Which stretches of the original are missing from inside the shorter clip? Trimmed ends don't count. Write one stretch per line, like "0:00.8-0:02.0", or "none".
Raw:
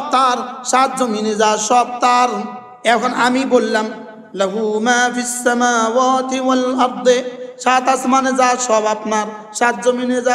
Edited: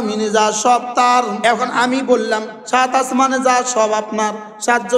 0:02.4-0:02.8
0:04.0-0:07.5